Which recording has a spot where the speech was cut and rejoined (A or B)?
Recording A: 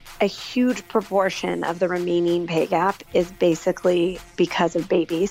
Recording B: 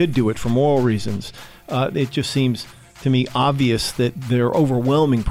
B